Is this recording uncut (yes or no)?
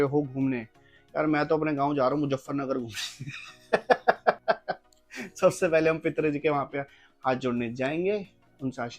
yes